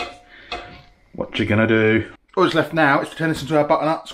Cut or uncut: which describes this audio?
cut